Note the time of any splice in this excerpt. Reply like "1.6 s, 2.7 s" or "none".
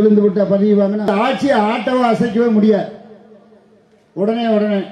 1.1 s